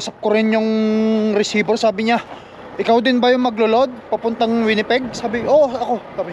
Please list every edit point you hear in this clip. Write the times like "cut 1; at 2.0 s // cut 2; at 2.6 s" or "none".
none